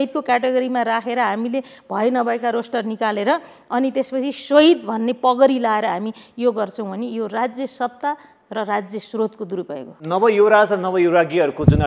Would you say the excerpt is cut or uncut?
cut